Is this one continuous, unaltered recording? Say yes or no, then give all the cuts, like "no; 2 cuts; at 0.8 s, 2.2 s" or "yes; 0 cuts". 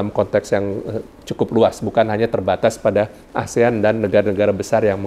yes; 0 cuts